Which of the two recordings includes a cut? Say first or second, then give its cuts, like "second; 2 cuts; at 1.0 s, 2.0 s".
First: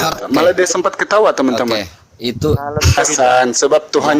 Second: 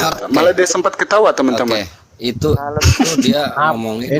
first; 1 cut; at 3.0 s